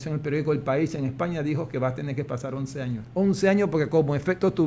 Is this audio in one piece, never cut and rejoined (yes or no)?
no